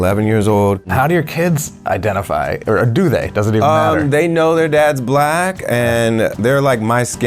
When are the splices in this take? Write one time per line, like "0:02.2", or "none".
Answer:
0:00.9